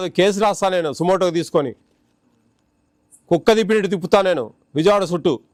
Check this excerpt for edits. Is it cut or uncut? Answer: uncut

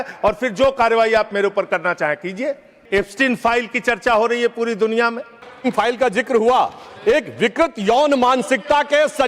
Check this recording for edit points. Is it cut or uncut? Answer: cut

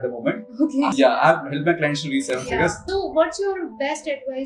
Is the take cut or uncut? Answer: cut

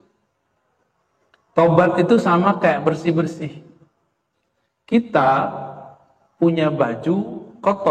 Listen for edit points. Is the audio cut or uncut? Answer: uncut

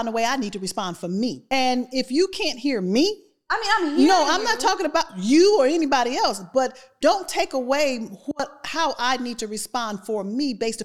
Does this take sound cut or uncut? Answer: cut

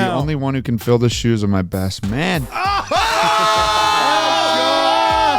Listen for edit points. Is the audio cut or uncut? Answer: uncut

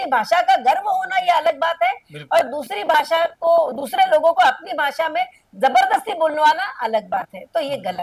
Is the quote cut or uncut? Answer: uncut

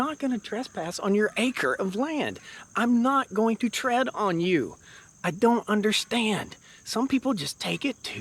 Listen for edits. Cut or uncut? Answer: uncut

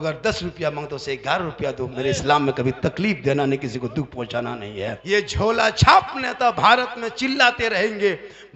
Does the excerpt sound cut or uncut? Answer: cut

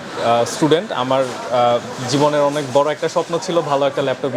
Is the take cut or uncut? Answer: uncut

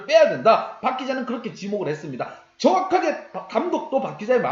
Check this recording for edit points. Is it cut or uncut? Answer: uncut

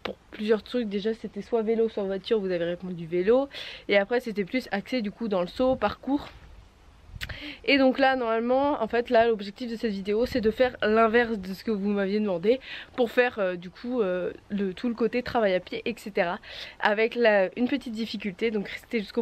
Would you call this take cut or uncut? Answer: uncut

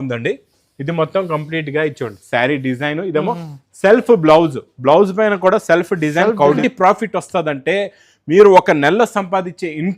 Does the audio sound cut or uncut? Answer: cut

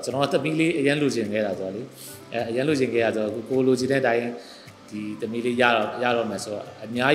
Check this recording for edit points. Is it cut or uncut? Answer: uncut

